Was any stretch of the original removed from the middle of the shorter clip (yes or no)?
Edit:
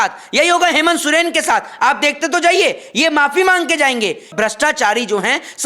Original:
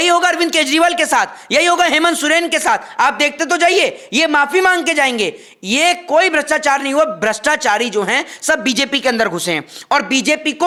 yes